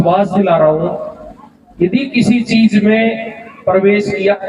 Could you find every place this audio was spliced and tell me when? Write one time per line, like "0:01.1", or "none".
none